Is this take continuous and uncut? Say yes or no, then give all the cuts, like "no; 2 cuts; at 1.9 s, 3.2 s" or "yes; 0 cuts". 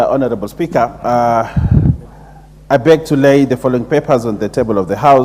yes; 0 cuts